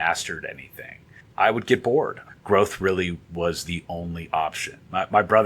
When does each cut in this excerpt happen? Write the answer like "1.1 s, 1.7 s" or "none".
1.2 s, 2.2 s